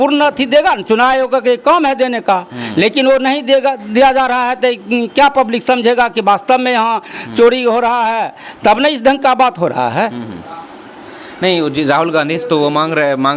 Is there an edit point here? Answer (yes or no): no